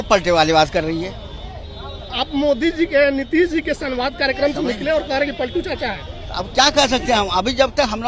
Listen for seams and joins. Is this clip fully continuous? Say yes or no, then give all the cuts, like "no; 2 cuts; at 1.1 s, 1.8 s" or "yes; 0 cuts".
yes; 0 cuts